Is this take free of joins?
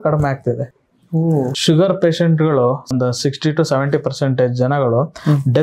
no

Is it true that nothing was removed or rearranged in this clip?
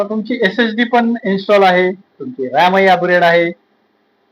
yes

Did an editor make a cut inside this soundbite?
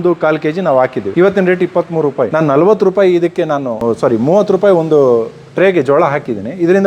yes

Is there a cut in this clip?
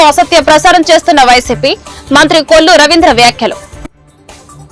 yes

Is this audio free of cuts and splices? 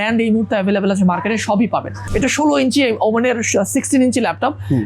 no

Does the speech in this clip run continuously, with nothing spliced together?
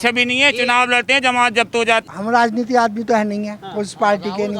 no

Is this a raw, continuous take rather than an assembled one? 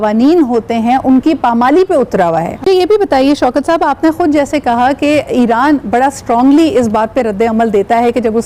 yes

